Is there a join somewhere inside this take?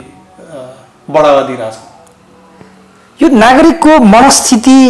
no; 0 cuts

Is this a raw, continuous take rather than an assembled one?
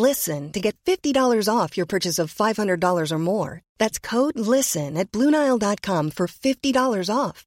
yes; 0 cuts

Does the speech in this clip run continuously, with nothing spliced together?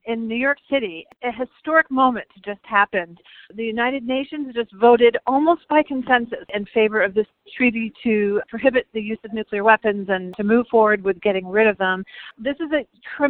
no; 4 cuts; at 1.1 s, 6.5 s, 10.3 s, 12.3 s

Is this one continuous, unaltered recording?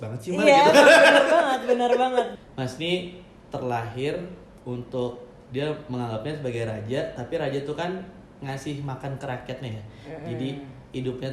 no; 1 cut; at 2.3 s

